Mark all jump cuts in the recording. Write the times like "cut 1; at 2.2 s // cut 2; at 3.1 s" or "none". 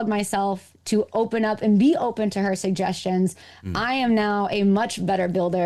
none